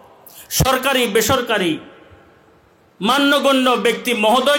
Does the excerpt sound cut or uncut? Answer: uncut